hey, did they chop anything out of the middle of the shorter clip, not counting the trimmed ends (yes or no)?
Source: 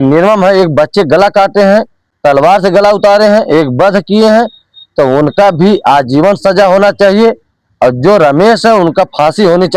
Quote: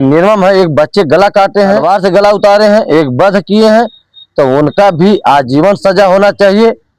yes